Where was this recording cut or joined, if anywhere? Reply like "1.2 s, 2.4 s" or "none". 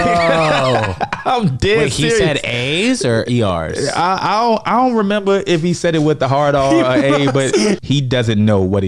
7.8 s